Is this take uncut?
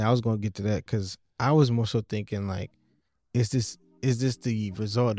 yes; 0 cuts

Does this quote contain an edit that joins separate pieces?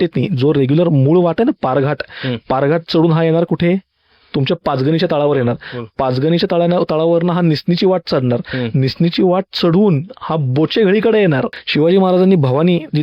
yes; 1 cut; at 11.6 s

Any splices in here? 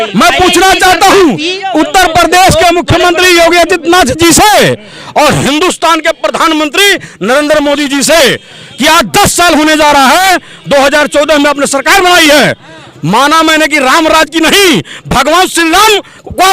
no; 0 cuts

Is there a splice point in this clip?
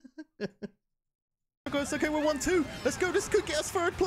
yes; 1 cut; at 1.7 s

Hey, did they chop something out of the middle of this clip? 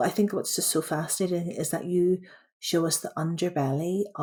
no; 0 cuts

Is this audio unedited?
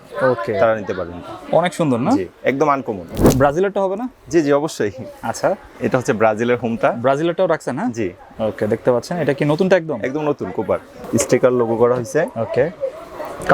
no; 2 cuts; at 3.1 s, 11.0 s

